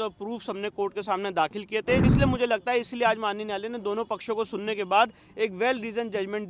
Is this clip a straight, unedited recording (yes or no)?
no